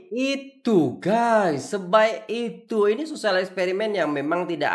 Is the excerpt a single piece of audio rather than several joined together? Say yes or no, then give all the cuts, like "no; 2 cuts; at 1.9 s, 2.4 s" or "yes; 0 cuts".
yes; 0 cuts